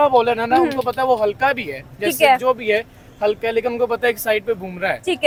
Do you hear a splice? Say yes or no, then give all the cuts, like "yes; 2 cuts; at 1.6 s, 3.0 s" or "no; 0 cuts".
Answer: no; 0 cuts